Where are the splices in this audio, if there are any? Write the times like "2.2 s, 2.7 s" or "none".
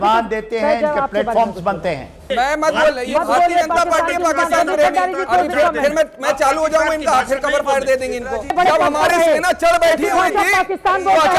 2.2 s, 8.5 s